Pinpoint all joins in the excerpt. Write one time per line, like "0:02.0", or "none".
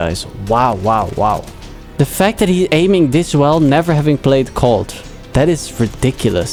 none